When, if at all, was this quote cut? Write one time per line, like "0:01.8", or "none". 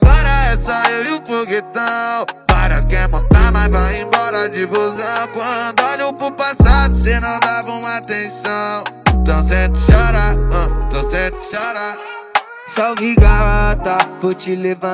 none